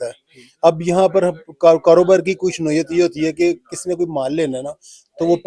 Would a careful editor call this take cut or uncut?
uncut